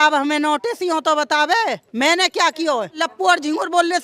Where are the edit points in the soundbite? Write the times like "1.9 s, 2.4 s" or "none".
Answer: 3.0 s